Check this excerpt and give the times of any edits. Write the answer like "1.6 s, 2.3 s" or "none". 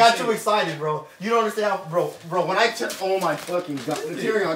none